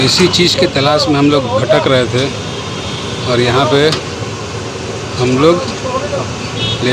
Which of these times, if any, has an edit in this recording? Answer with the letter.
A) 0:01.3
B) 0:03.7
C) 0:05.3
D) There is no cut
D